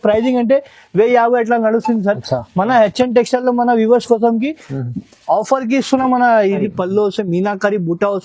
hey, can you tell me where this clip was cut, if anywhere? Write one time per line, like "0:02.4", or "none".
0:06.6